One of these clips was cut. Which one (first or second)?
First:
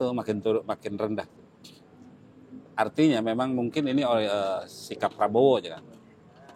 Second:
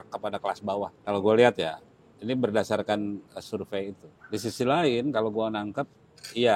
second